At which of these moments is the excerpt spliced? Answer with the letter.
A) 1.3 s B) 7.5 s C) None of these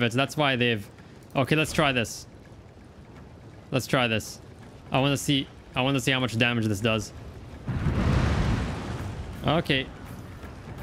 C